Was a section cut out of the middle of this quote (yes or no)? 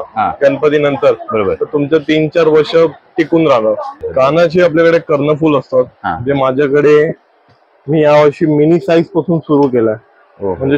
yes